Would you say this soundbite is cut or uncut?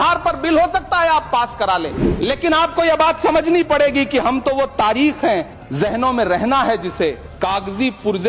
cut